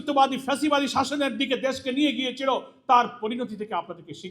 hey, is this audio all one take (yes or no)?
yes